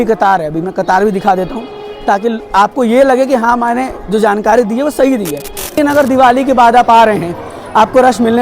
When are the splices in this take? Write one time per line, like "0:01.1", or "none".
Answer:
0:05.8

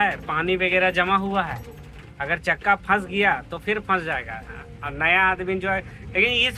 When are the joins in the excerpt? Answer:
none

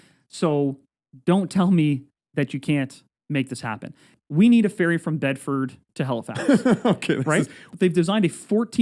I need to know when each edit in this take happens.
0:04.1
0:05.8
0:07.6

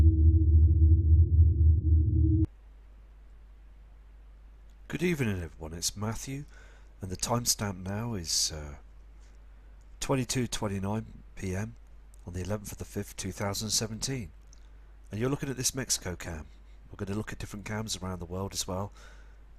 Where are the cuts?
none

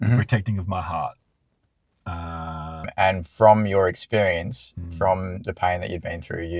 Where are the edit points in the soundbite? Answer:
0:02.9

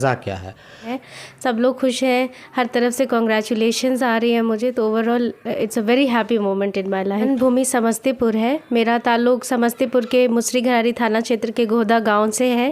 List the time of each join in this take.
0:01.0
0:07.3

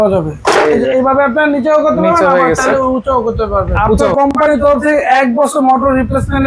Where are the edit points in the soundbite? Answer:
0:04.1

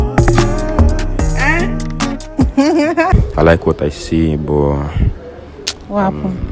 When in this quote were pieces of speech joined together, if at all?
0:03.1

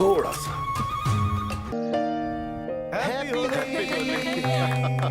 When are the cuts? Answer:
0:01.7

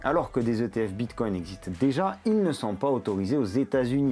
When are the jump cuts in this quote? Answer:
none

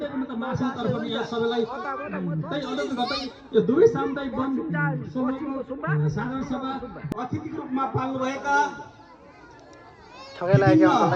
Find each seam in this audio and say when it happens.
0:07.1

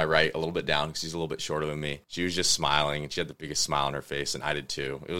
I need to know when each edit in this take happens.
none

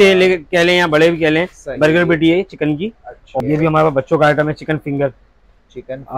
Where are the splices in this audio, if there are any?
0:03.4

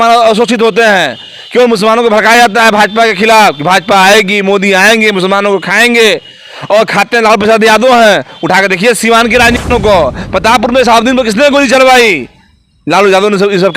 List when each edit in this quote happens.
0:09.7

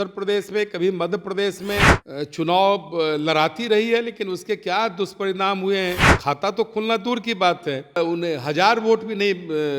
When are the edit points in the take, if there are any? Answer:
0:02.0
0:06.1
0:08.0

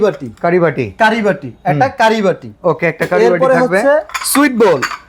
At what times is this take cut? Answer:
none

